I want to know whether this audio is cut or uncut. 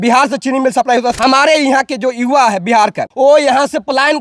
cut